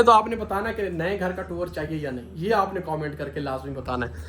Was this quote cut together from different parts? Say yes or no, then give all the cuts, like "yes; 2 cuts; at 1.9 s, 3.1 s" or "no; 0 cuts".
yes; 1 cut; at 2.4 s